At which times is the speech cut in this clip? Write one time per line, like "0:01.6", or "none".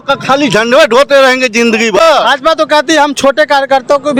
none